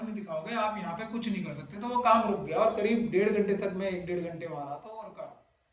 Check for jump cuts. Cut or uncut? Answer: uncut